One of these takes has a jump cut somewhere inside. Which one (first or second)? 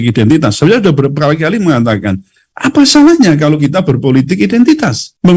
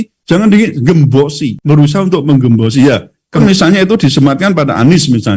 second